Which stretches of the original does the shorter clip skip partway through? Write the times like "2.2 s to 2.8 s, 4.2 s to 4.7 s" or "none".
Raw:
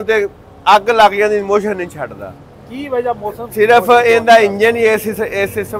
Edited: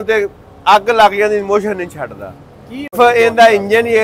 2.9 s to 3.8 s